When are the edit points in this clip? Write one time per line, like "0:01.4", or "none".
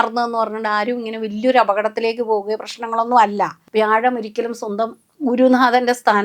0:03.6